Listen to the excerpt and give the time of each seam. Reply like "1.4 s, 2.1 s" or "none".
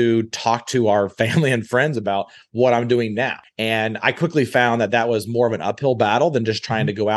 3.4 s